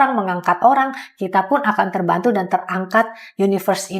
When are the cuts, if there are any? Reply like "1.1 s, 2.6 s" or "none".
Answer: none